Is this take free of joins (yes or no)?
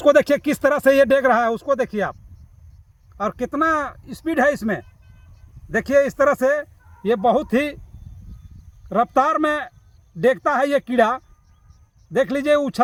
yes